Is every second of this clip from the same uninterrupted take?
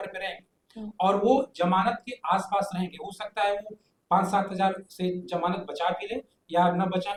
yes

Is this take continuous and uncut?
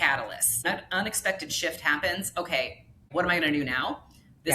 no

